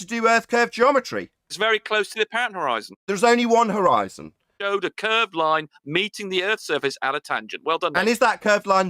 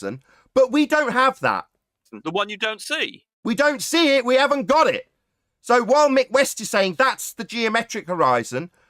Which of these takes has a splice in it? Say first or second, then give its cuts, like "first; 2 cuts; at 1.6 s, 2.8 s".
first; 1 cut; at 4.4 s